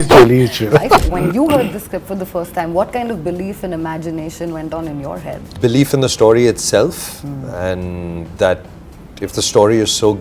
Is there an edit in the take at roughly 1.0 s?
yes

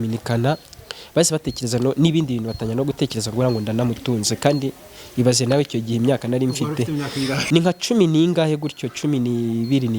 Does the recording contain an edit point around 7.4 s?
yes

